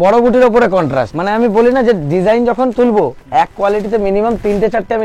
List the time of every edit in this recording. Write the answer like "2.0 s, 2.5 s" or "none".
1.1 s